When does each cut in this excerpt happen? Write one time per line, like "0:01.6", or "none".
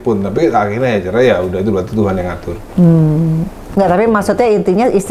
none